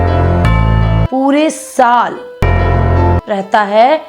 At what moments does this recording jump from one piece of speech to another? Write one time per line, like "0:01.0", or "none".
0:01.0